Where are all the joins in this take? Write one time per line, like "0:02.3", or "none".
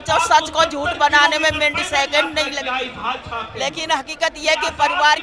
none